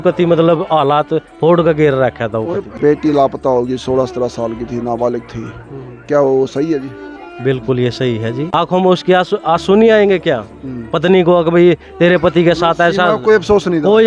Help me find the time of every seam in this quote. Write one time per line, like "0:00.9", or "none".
0:02.7
0:08.5